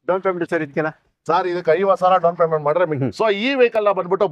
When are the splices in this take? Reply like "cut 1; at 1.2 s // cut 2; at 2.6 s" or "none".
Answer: cut 1; at 3.0 s